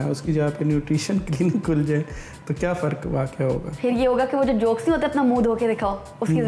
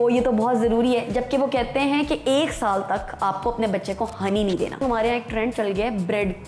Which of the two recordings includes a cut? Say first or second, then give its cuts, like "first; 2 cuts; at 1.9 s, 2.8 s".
second; 1 cut; at 4.8 s